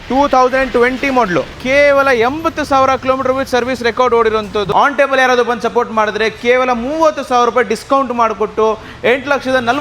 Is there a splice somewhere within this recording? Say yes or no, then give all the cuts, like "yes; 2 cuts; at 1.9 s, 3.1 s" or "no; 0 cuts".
yes; 2 cuts; at 1.6 s, 4.7 s